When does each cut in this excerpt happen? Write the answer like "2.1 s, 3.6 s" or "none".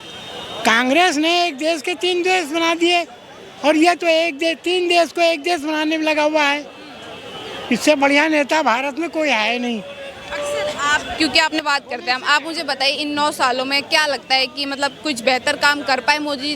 11.6 s